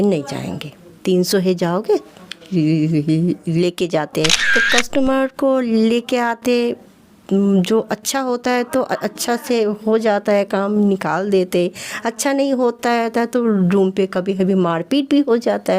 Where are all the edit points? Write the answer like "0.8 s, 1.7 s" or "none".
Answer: 4.5 s

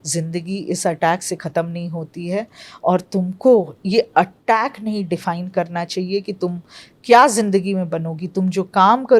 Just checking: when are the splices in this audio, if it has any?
none

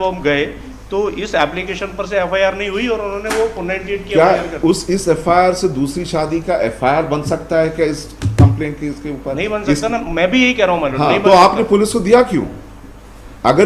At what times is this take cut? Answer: none

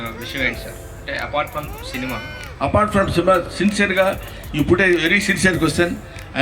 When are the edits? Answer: none

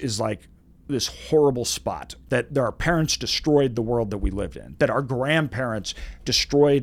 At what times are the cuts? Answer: 2.1 s

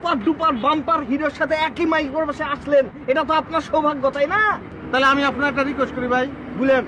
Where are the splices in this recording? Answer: 4.7 s

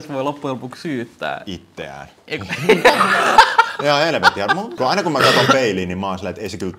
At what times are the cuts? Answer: 4.7 s

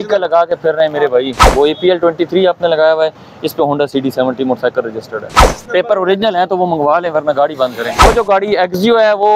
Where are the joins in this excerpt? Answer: 1.4 s, 5.4 s, 8.0 s

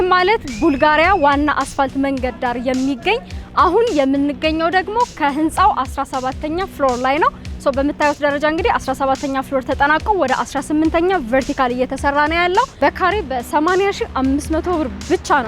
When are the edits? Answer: 12.7 s

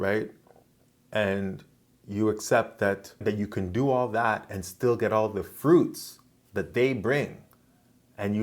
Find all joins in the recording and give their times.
3.2 s

